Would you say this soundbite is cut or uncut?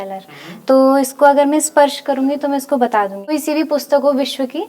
cut